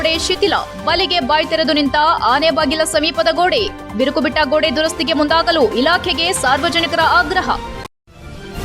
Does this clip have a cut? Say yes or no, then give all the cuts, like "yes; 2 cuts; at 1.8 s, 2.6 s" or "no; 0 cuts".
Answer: yes; 1 cut; at 7.7 s